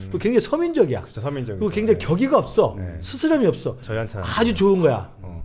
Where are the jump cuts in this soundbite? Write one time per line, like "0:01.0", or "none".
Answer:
none